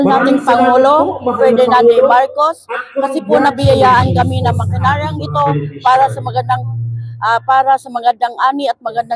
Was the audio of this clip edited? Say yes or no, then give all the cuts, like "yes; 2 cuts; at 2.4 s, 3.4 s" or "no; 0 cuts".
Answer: no; 0 cuts